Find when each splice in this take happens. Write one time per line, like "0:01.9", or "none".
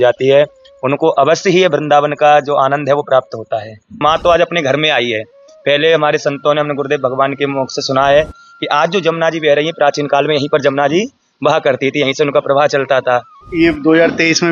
0:04.0
0:13.3